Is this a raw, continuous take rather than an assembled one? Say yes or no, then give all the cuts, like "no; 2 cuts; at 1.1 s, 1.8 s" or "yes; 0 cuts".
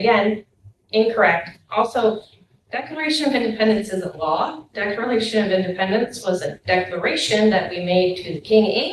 yes; 0 cuts